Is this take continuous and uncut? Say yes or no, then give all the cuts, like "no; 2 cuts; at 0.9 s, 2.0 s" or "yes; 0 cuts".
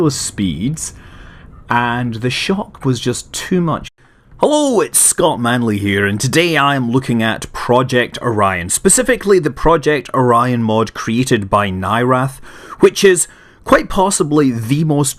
yes; 0 cuts